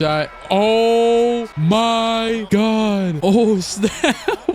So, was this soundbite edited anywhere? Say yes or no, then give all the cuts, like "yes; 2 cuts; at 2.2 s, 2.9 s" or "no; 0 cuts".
yes; 2 cuts; at 1.5 s, 2.4 s